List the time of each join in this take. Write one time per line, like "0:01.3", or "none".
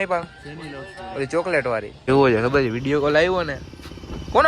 0:01.9